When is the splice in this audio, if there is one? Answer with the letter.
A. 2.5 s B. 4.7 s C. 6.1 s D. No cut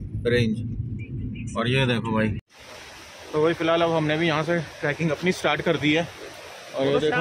A